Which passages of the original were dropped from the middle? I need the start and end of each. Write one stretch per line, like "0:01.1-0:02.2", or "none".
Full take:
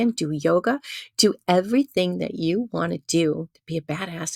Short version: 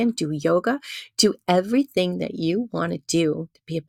none